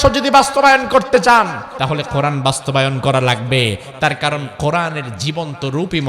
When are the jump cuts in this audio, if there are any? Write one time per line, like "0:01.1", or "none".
0:01.6